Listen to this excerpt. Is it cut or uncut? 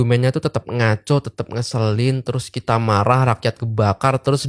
uncut